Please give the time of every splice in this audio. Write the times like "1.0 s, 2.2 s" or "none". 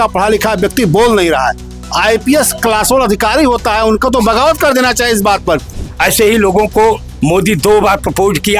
5.7 s